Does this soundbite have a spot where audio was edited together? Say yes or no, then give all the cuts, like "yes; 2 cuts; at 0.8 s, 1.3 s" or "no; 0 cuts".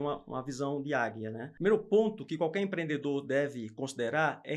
yes; 1 cut; at 1.4 s